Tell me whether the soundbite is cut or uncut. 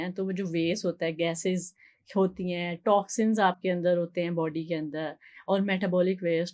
uncut